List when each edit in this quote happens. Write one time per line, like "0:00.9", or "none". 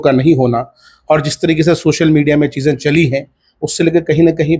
none